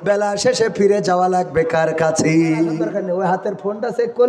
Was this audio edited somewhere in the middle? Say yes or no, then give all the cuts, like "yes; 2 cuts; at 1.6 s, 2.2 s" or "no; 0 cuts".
yes; 1 cut; at 2.8 s